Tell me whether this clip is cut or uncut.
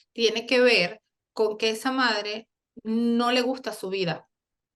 uncut